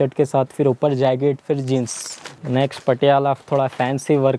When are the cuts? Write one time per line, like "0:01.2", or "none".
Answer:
0:02.3